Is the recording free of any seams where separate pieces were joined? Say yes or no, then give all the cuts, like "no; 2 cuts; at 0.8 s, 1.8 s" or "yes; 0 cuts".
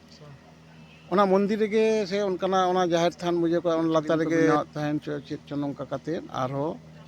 no; 1 cut; at 4.5 s